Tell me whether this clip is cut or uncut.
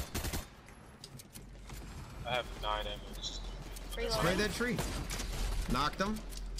uncut